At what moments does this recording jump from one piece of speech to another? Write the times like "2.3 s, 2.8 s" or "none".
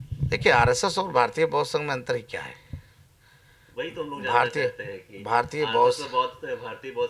none